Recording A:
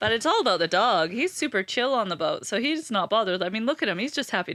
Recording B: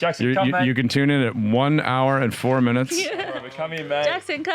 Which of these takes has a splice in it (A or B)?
B